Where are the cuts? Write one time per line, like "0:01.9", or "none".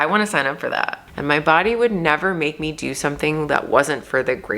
0:01.0